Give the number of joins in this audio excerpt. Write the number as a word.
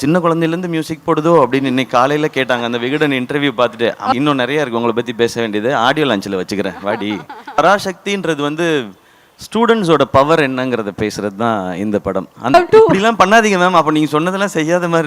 three